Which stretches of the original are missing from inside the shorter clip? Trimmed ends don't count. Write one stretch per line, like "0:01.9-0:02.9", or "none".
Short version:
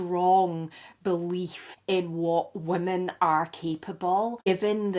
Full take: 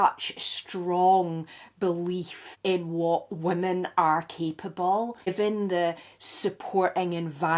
none

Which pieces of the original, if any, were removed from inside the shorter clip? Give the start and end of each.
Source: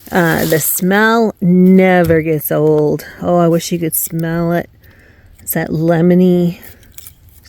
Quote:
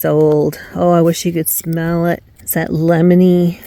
0:04.8-0:05.3

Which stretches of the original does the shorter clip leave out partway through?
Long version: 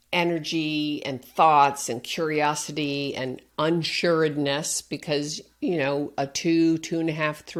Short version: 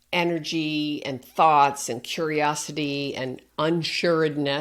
none

